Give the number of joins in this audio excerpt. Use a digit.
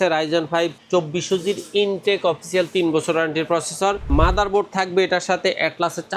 2